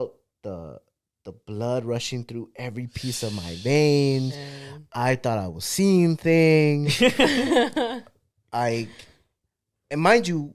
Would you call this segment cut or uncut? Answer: uncut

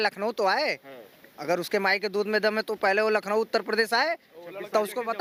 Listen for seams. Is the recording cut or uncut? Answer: uncut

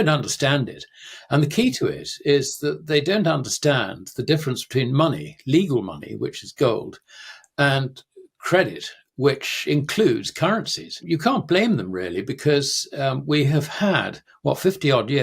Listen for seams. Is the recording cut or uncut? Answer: cut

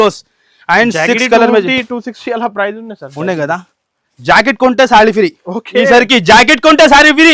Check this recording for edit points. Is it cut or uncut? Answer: uncut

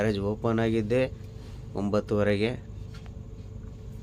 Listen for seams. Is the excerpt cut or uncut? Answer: uncut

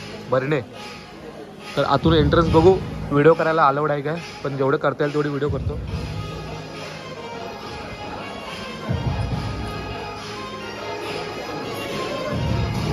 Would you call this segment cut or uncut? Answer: uncut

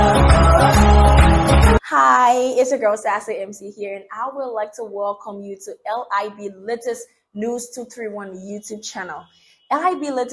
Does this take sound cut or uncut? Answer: cut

